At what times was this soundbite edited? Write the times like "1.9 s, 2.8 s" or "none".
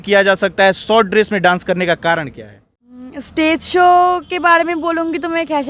3.0 s